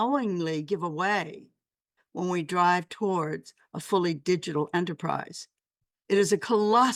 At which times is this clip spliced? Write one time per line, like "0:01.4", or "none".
none